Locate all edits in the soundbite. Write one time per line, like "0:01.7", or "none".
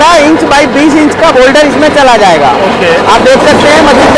none

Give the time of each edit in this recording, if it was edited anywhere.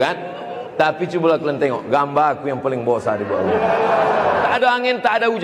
0:04.5

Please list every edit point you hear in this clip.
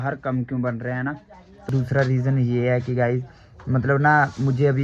0:01.7

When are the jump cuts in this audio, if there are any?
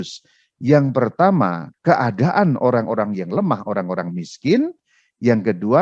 0:01.7

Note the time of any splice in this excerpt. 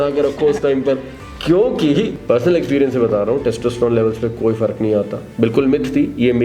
0:02.1

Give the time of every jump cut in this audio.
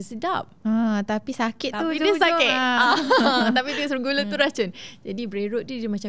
none

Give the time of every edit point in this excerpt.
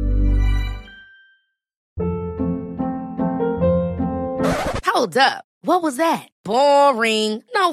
0:01.8

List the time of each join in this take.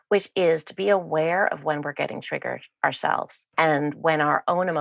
0:03.4

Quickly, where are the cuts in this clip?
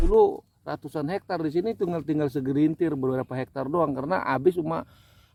none

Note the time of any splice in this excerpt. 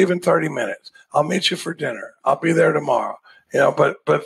none

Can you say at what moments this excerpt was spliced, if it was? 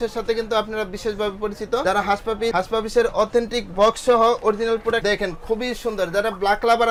none

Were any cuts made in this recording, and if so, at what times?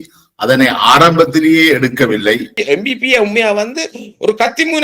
0:02.5

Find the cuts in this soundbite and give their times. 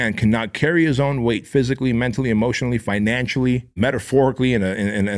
0:03.7

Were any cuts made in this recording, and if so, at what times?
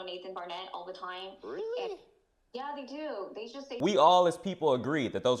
0:03.6

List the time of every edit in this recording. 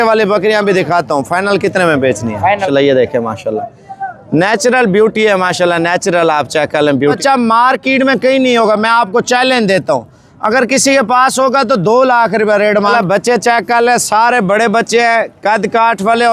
0:02.6
0:07.2
0:12.9

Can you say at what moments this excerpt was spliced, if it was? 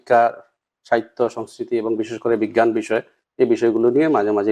none

